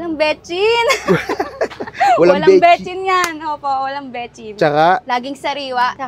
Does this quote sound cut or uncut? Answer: uncut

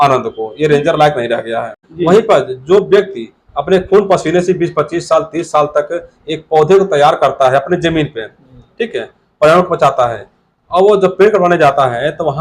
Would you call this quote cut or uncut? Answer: cut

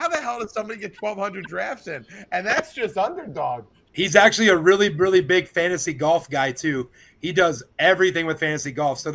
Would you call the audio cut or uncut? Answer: cut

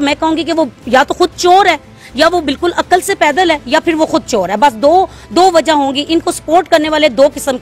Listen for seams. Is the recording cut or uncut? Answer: uncut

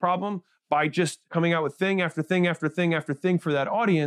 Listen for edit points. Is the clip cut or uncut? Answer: cut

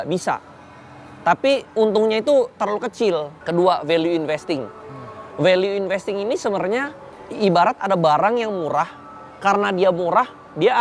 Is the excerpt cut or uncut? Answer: cut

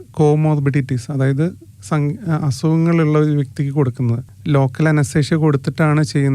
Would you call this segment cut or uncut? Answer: cut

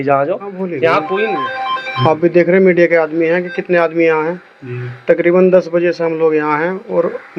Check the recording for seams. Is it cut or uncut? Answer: cut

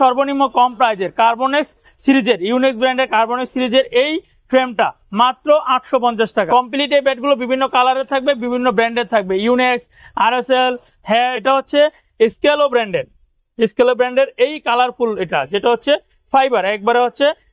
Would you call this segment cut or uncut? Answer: cut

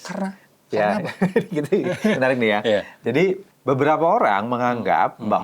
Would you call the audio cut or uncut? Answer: cut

